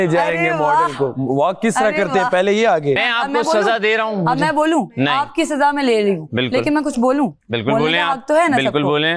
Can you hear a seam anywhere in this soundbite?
yes; 1 cut; at 3.1 s

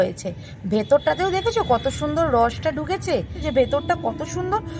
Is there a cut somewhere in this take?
yes; 1 cut; at 3.4 s

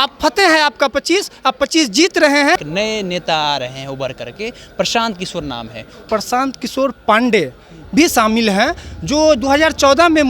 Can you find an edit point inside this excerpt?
yes; 2 cuts; at 2.7 s, 6.1 s

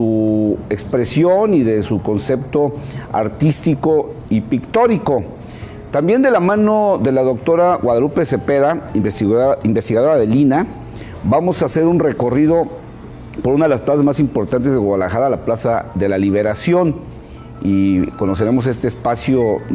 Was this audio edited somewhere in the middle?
yes; 1 cut; at 13.6 s

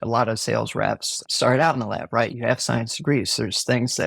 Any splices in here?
yes; 2 cuts; at 1.1 s, 2.3 s

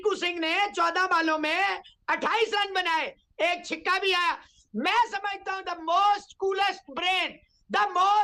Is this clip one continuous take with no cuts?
yes; 0 cuts

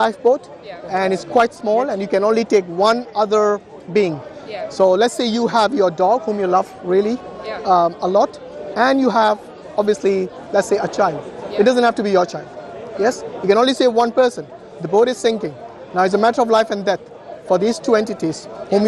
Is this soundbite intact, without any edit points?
yes; 0 cuts

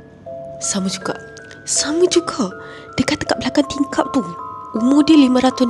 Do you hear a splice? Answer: no; 0 cuts

